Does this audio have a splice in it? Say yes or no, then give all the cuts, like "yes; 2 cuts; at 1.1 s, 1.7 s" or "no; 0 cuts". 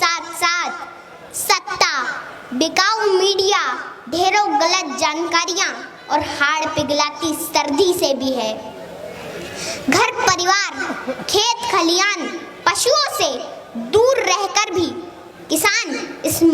no; 0 cuts